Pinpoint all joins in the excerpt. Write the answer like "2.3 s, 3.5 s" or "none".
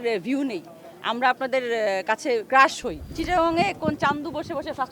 3.1 s